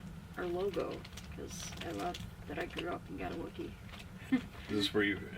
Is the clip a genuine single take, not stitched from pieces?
no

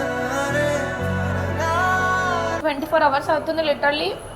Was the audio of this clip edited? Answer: yes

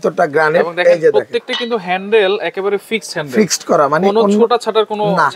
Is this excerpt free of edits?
yes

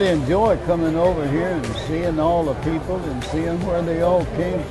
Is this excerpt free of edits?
yes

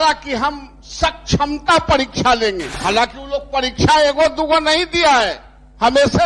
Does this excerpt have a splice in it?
yes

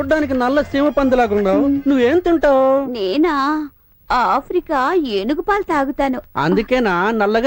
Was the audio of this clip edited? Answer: no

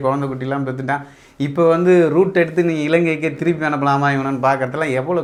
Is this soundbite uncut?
yes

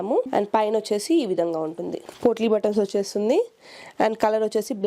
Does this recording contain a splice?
no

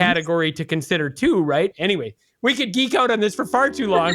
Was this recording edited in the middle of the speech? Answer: yes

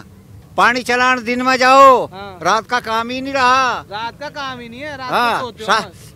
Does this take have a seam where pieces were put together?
no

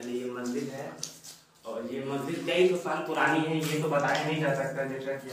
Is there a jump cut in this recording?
no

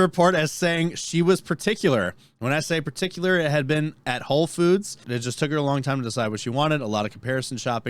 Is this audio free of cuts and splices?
no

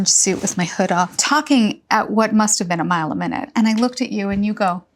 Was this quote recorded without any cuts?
no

